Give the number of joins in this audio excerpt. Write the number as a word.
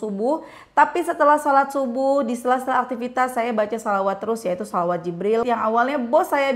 one